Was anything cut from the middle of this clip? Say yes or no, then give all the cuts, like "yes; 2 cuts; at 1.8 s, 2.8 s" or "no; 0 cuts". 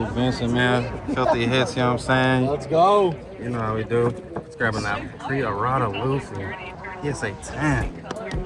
no; 0 cuts